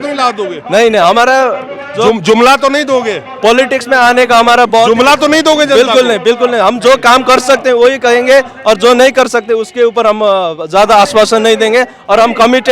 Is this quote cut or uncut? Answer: uncut